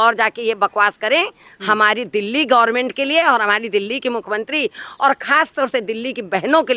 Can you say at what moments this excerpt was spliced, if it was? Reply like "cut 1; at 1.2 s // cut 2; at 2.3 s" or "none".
none